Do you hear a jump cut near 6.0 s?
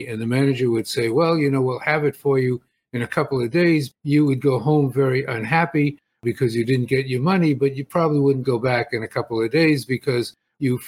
no; 1 cut; at 3.9 s

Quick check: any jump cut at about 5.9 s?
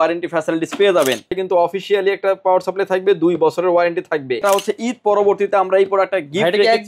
no; 2 cuts; at 1.3 s, 4.4 s

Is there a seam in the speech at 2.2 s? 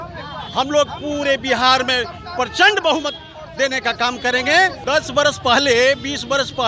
no; 1 cut; at 4.8 s

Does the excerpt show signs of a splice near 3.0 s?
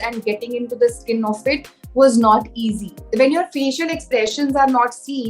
yes; 1 cut; at 3.0 s

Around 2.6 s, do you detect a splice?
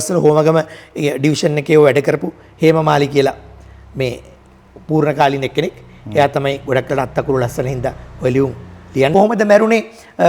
no; 1 cut; at 9.1 s

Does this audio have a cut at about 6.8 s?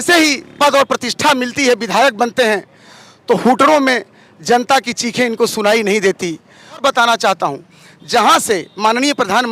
yes; 1 cut; at 6.8 s

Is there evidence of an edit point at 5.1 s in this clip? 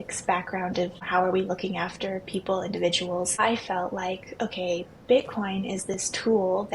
no; 2 cuts; at 1.0 s, 3.4 s

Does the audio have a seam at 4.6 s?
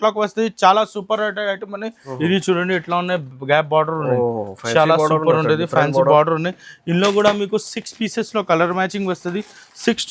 no; 1 cut; at 2.0 s

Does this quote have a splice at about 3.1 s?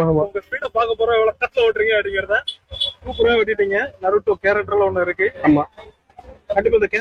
yes; 1 cut; at 3.1 s

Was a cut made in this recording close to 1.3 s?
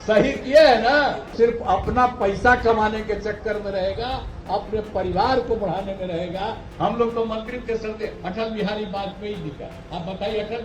yes; 2 cuts; at 1.3 s, 6.6 s

